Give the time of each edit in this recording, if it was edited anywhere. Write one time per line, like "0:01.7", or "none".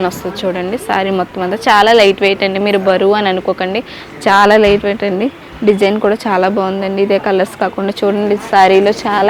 none